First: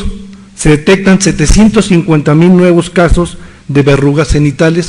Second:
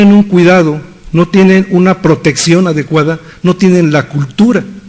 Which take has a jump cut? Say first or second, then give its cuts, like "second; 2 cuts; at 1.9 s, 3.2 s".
first; 1 cut; at 0.9 s